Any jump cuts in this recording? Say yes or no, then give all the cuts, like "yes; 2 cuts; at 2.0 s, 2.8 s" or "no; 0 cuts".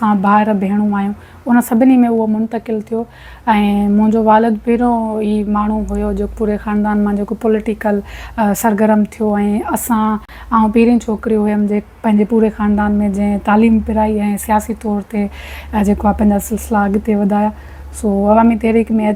no; 0 cuts